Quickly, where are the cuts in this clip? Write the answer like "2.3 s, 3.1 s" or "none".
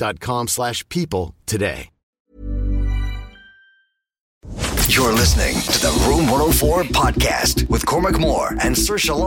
4.3 s